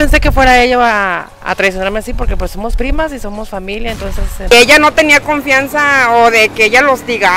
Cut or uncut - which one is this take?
cut